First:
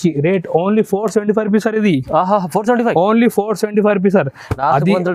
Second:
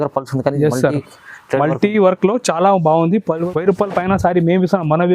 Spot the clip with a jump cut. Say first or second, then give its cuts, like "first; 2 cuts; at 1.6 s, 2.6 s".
second; 1 cut; at 3.4 s